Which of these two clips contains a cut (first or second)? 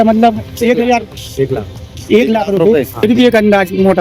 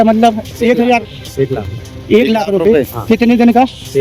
first